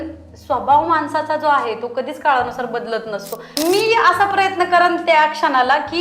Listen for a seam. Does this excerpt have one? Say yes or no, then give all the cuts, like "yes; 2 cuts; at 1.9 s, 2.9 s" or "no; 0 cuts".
yes; 1 cut; at 3.5 s